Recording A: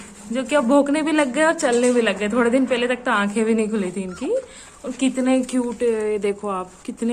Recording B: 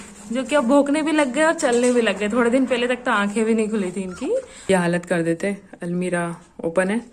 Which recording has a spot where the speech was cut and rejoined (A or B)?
B